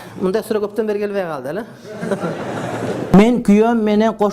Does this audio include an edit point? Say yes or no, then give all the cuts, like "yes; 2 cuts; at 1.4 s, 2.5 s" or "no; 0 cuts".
yes; 1 cut; at 3.0 s